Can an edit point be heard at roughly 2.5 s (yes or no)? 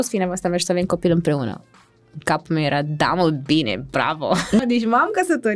no